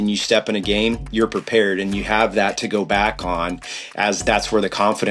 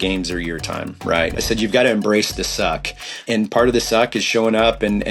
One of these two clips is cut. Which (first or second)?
second